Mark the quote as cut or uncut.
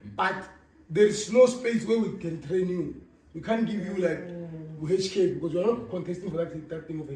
uncut